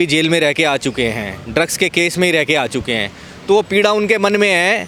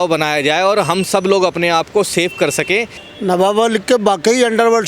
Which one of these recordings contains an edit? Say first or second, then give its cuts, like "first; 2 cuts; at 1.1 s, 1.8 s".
second; 1 cut; at 3.0 s